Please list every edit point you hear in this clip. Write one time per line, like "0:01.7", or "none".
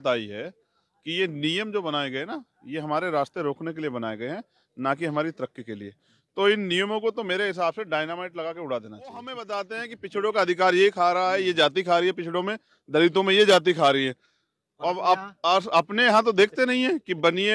0:09.4